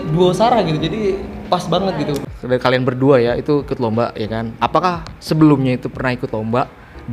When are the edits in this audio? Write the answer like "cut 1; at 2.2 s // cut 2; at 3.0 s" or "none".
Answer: cut 1; at 2.2 s